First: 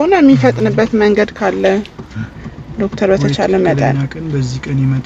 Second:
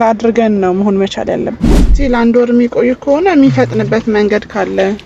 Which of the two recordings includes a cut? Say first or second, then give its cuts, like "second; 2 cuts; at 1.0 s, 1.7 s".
second; 1 cut; at 1.8 s